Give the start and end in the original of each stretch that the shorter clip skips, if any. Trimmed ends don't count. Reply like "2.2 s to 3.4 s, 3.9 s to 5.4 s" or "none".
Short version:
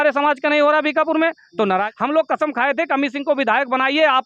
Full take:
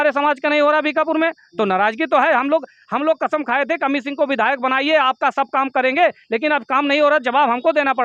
1.9 s to 2.8 s